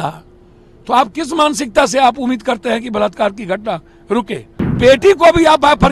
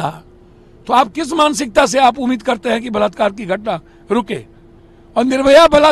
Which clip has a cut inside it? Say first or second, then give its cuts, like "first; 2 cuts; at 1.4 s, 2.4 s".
first; 1 cut; at 4.8 s